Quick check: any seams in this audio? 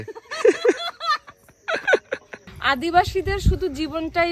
yes; 1 cut; at 2.5 s

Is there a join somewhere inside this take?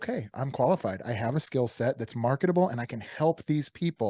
no; 0 cuts

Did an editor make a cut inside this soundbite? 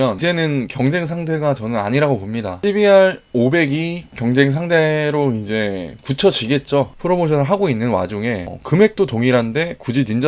yes; 1 cut; at 6.9 s

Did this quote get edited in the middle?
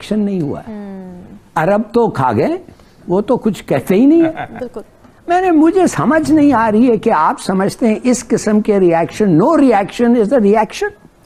no; 0 cuts

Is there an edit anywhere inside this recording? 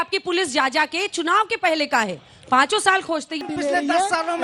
yes; 1 cut; at 3.4 s

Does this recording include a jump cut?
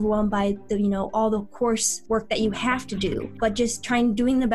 yes; 2 cuts; at 1.9 s, 3.3 s

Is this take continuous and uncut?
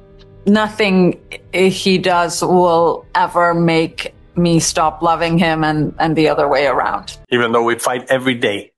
no; 1 cut; at 7.1 s

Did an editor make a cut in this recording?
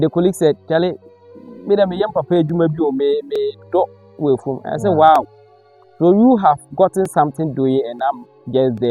no; 0 cuts

